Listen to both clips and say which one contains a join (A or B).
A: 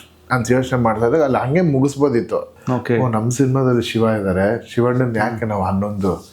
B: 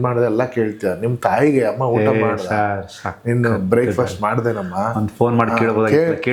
A